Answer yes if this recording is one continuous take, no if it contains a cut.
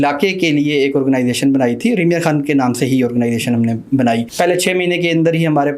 no